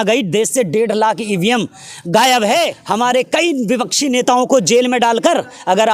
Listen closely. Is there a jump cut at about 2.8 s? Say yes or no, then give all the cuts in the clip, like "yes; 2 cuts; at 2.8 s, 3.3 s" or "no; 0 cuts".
yes; 1 cut; at 2.8 s